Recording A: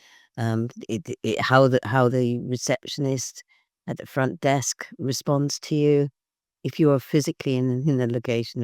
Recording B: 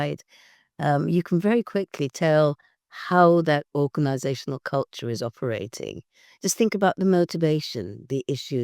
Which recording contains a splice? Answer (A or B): B